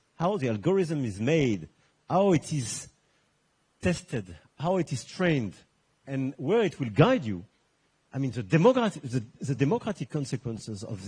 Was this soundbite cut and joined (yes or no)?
no